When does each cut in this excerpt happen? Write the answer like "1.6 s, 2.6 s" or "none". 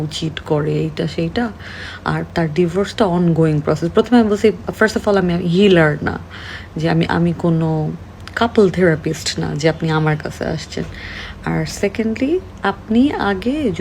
none